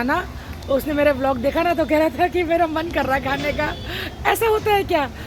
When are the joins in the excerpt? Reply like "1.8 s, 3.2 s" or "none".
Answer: none